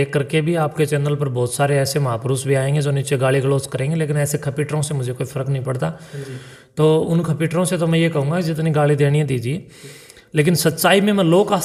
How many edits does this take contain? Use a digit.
0